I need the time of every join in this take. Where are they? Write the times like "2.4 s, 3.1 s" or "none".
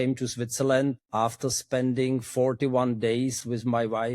1.0 s